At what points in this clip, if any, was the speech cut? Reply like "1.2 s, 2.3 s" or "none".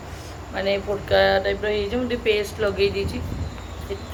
none